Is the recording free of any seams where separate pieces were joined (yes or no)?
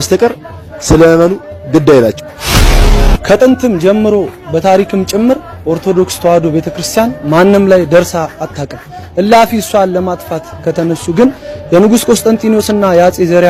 yes